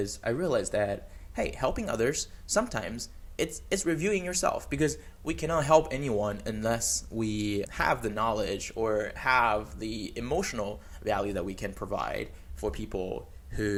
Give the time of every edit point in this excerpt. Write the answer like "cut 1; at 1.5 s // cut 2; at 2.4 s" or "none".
none

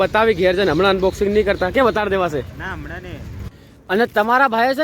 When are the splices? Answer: cut 1; at 3.5 s

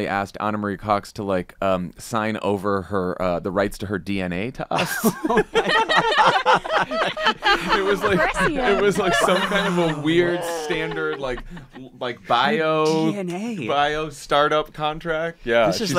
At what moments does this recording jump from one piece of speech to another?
none

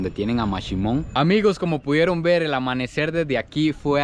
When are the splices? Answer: cut 1; at 1.1 s

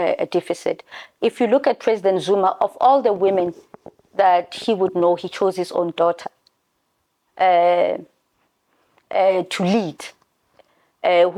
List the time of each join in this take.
none

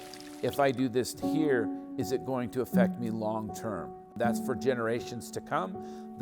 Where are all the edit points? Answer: cut 1; at 4.1 s

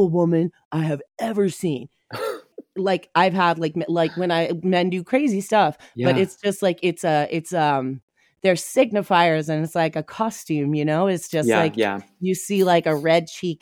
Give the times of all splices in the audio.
cut 1; at 2.5 s

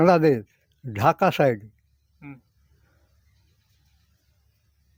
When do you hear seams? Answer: none

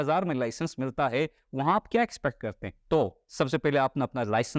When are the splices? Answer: none

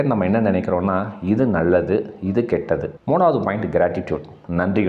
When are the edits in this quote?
cut 1; at 2.9 s

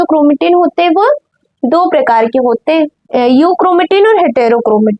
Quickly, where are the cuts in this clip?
cut 1; at 3.0 s

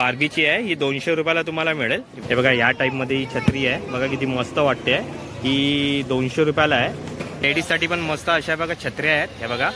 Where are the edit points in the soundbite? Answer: cut 1; at 2.1 s // cut 2; at 7.4 s

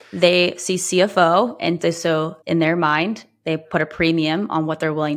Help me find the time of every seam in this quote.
cut 1; at 2.4 s

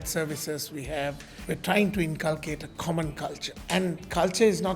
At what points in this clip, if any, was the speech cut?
cut 1; at 1.3 s // cut 2; at 3.5 s

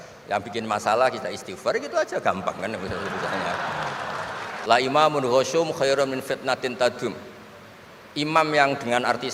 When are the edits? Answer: cut 1; at 4.5 s

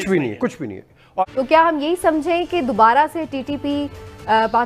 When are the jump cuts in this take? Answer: cut 1; at 1.3 s

